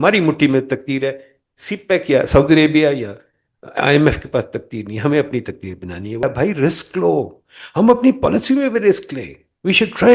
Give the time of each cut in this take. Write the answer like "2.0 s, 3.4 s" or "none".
6.2 s